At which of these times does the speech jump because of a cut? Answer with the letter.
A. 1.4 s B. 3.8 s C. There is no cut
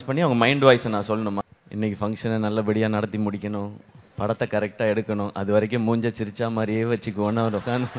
A